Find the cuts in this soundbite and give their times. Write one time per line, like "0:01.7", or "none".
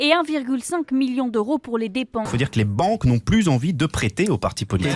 0:02.3